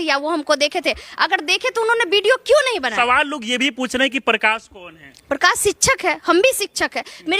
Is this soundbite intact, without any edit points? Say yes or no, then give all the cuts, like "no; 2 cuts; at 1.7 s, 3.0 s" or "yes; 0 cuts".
no; 1 cut; at 2.9 s